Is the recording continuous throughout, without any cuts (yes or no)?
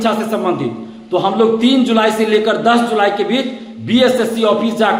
yes